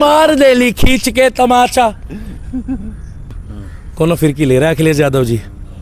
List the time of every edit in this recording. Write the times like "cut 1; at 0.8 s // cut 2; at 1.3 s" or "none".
cut 1; at 3.3 s